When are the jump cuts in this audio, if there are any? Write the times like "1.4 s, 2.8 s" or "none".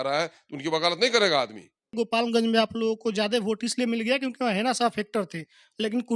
1.9 s